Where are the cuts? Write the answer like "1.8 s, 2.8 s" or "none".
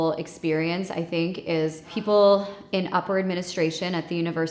1.9 s